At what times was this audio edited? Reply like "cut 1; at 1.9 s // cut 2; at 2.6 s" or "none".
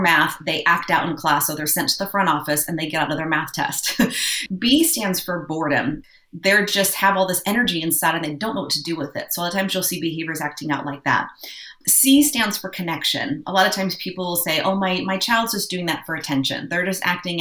cut 1; at 4.3 s // cut 2; at 6.0 s